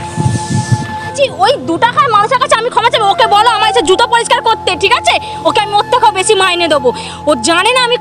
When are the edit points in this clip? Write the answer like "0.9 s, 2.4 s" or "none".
1.1 s